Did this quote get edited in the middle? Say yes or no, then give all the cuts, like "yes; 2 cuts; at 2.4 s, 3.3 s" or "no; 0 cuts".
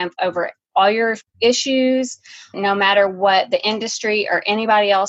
yes; 2 cuts; at 0.9 s, 2.6 s